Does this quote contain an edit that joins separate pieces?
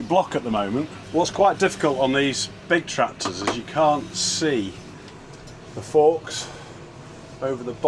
no; 0 cuts

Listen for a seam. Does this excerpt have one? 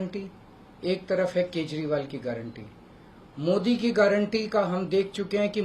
no; 0 cuts

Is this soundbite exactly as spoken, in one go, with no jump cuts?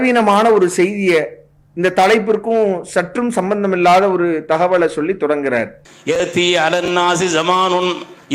yes; 0 cuts

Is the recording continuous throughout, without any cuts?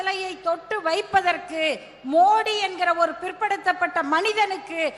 yes; 0 cuts

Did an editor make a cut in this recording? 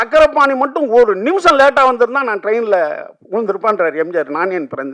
no; 0 cuts

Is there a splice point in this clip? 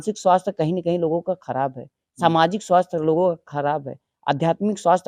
no; 0 cuts

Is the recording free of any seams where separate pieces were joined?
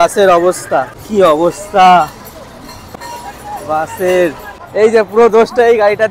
no; 3 cuts; at 1.0 s, 2.8 s, 4.5 s

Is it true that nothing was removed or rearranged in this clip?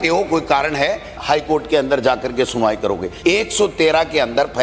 no; 2 cuts; at 1.1 s, 3.1 s

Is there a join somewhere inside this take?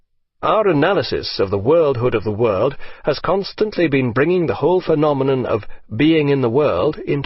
no; 0 cuts

